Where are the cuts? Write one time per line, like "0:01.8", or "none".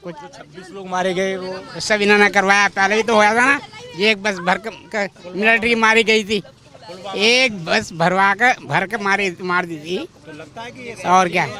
none